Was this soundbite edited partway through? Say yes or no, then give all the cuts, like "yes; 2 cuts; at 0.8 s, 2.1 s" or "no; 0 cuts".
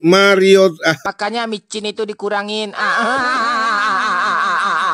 yes; 1 cut; at 1.0 s